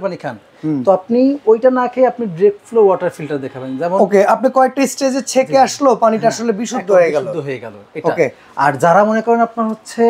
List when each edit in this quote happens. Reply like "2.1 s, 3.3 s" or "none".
none